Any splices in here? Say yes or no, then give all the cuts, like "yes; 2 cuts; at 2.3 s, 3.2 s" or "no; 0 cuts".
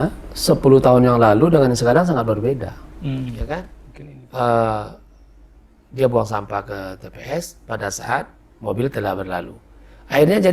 yes; 1 cut; at 3.8 s